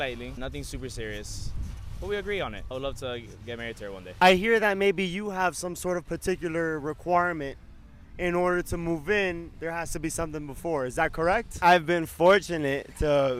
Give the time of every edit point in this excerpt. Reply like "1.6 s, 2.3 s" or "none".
4.1 s, 11.5 s